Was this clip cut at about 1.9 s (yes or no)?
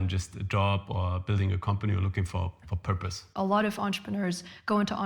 no